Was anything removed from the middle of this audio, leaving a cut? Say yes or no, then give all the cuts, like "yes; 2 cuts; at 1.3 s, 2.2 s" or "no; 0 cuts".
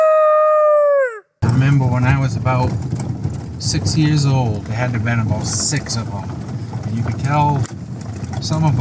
yes; 2 cuts; at 1.4 s, 4.6 s